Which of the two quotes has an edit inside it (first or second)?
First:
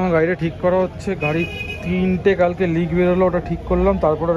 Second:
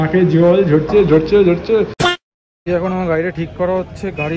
second